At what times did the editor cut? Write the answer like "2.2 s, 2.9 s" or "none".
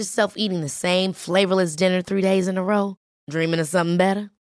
none